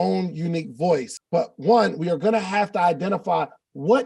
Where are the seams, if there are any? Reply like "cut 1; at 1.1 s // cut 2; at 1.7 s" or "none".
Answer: cut 1; at 1.2 s